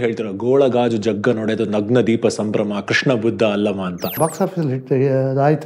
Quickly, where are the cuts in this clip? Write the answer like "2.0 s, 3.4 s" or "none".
4.1 s